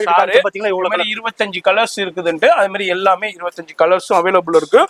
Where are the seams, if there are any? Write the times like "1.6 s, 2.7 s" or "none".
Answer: none